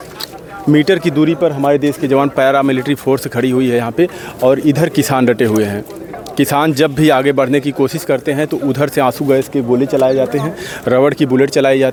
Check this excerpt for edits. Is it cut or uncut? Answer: uncut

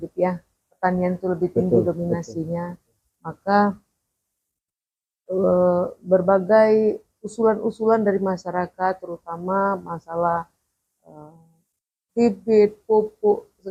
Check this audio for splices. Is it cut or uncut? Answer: uncut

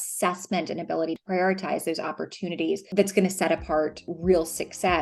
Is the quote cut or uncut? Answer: cut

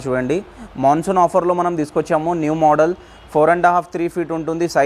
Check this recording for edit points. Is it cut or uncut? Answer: uncut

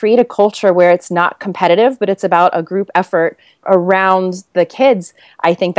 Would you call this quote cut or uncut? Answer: uncut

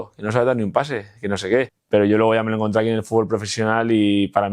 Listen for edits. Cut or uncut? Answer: cut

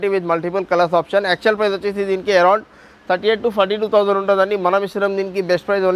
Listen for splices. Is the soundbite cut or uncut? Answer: uncut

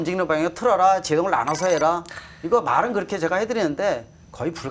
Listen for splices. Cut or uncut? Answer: uncut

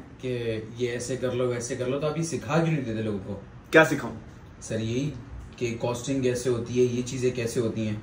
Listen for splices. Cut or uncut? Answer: uncut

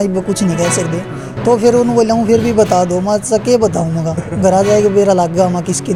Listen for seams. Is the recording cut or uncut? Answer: uncut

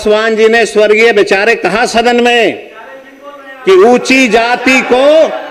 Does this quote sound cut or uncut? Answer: uncut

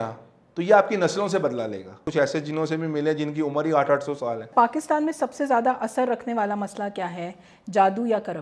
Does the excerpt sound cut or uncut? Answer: cut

